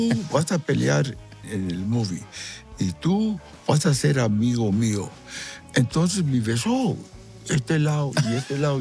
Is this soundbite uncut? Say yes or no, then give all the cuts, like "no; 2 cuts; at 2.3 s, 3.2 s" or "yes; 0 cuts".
no; 1 cut; at 1.5 s